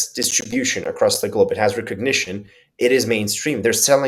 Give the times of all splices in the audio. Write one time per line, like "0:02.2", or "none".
none